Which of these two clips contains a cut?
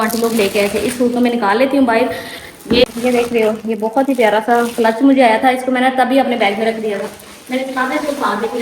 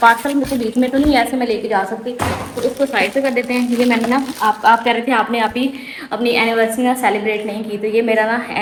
first; 1 cut; at 2.9 s

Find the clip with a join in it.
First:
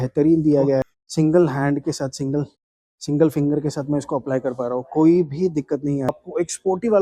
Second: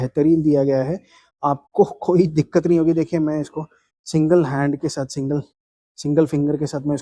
first; 2 cuts; at 1.0 s, 6.1 s

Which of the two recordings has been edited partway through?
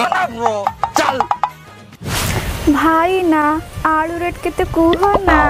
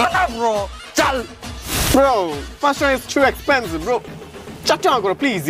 second; 1 cut; at 1.4 s

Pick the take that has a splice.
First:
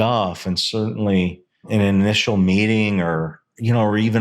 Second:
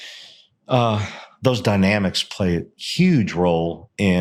first; 1 cut; at 1.7 s

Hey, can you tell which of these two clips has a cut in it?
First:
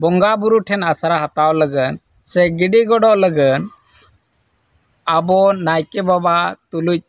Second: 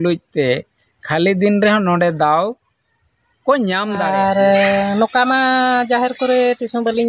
second; 1 cut; at 4.0 s

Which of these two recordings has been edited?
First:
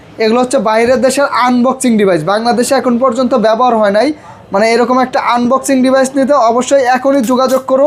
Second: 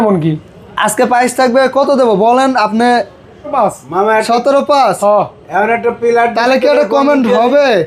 second; 1 cut; at 3.5 s

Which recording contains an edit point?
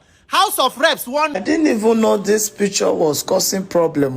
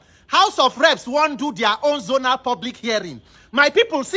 first; 1 cut; at 1.3 s

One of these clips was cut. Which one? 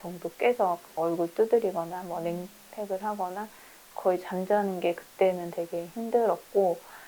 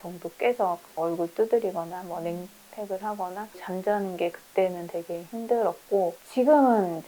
second; 2 cuts; at 3.6 s, 6.2 s

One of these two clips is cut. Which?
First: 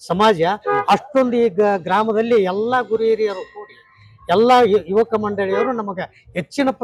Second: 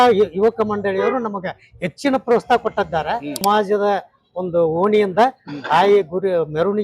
second; 1 cut; at 3.4 s

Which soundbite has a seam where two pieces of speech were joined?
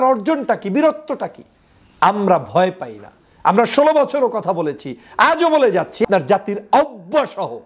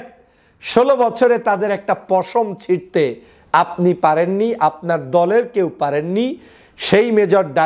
first; 1 cut; at 6.0 s

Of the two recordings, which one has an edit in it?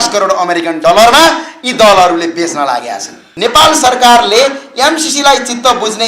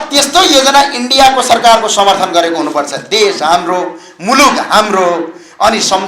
first; 1 cut; at 3.2 s

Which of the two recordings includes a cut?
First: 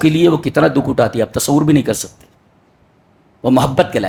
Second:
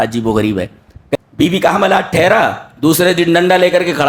second; 1 cut; at 1.2 s

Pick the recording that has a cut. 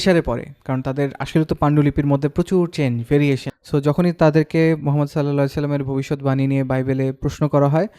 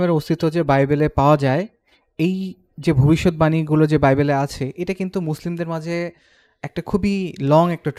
first; 1 cut; at 3.5 s

